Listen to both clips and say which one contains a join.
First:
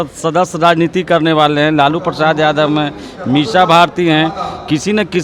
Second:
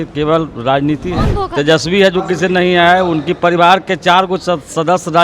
second; 1 cut; at 1.4 s

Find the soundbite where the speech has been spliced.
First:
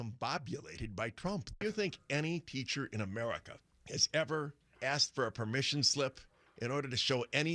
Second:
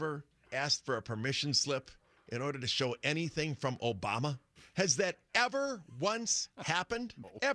first; 1 cut; at 1.5 s

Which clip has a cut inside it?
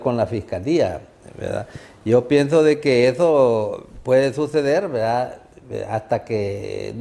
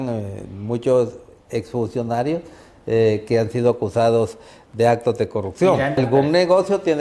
second; 1 cut; at 6.0 s

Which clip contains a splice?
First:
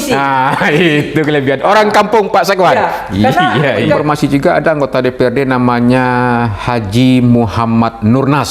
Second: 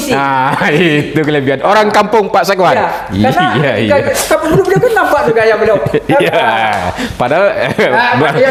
first; 1 cut; at 4.0 s

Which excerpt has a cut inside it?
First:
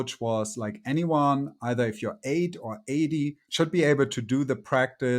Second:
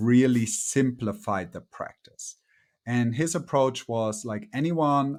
first; 1 cut; at 3.4 s

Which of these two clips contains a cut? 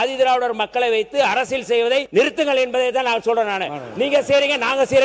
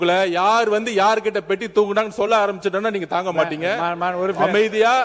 first; 1 cut; at 2.1 s

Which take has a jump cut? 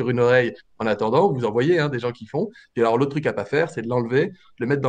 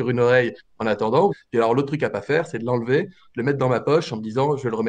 second; 1 cut; at 1.4 s

